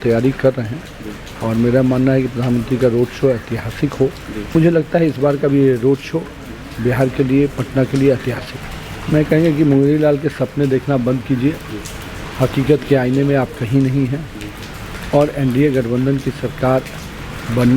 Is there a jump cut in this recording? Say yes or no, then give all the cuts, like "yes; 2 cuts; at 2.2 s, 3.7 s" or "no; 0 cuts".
yes; 2 cuts; at 4.5 s, 8.5 s